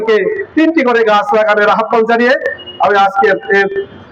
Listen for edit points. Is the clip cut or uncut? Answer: uncut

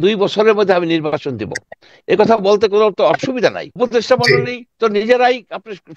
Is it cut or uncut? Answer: cut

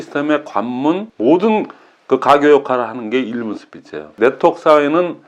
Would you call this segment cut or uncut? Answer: cut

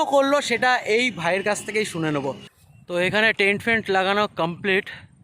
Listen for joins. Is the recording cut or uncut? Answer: cut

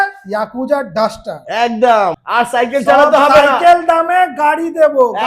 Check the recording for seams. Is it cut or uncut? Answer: cut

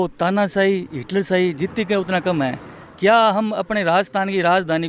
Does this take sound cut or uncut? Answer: uncut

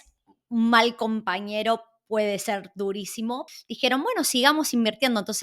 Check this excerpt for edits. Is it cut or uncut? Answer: cut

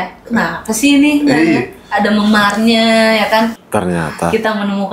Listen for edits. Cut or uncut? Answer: cut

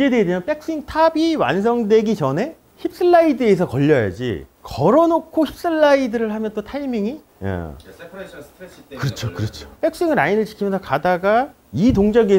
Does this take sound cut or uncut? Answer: cut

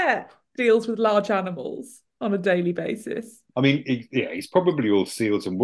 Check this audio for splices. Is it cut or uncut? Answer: uncut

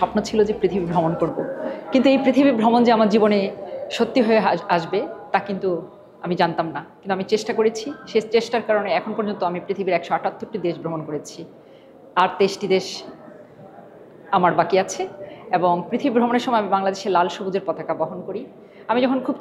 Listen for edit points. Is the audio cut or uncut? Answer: uncut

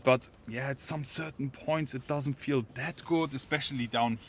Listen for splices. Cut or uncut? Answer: uncut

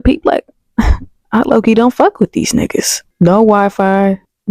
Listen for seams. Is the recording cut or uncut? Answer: cut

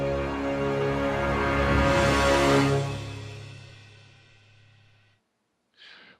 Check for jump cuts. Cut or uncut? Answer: cut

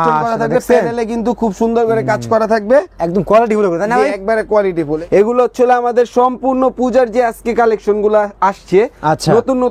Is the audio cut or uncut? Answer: cut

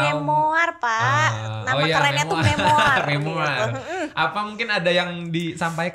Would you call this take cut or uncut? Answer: uncut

